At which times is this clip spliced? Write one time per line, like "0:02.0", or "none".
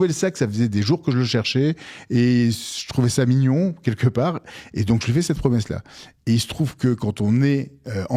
none